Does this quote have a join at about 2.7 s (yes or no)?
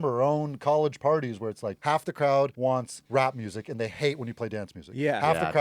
yes